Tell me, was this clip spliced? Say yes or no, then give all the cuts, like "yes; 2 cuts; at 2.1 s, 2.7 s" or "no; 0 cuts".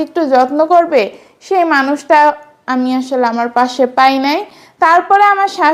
no; 0 cuts